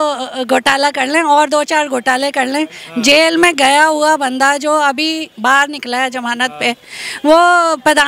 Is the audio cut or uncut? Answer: uncut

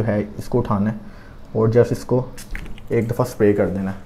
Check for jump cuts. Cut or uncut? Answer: uncut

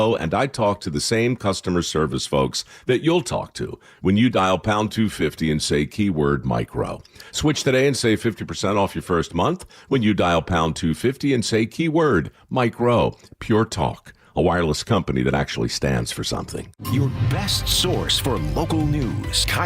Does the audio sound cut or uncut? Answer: cut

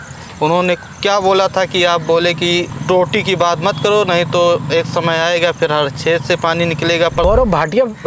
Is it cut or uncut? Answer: cut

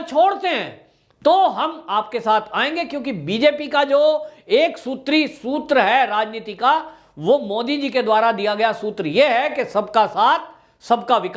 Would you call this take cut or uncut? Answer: uncut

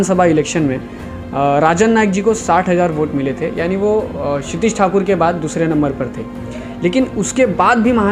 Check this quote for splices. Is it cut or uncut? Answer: uncut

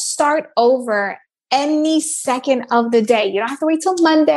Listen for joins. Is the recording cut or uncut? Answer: uncut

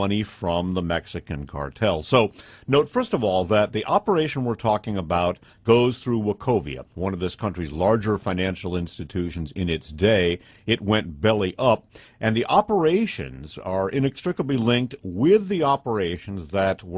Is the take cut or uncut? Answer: uncut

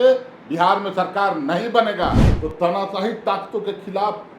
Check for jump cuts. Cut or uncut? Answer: cut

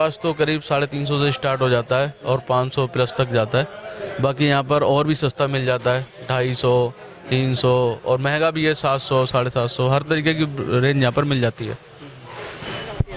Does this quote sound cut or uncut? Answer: uncut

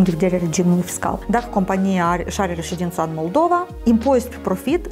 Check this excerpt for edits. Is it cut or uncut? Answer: cut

